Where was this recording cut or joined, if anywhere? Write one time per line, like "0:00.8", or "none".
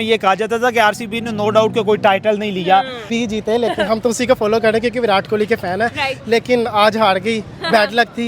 0:03.1